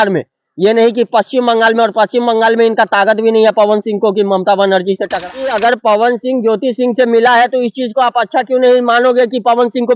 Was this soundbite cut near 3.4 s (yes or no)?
no